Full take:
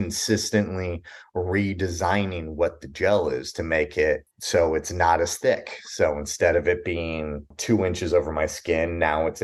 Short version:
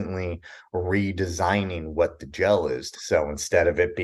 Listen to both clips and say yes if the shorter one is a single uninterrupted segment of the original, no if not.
no